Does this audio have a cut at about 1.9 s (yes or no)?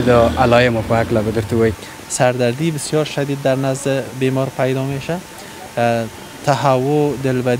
yes